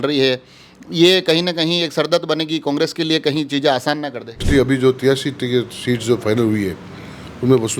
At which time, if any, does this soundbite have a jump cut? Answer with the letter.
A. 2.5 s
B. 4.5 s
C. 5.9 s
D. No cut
B